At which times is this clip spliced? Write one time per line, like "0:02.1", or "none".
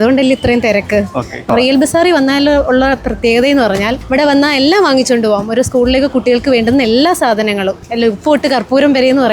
none